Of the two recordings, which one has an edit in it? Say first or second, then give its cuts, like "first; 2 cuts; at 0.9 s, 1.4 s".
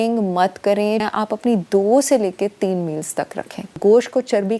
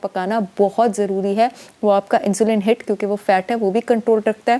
first; 2 cuts; at 1.0 s, 3.8 s